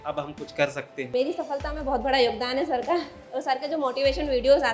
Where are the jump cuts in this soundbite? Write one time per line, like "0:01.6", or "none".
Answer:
0:01.1